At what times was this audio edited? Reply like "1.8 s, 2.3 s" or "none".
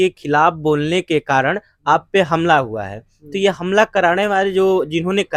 none